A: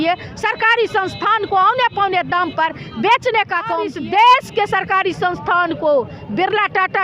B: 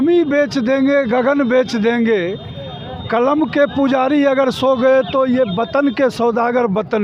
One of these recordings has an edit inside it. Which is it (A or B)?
A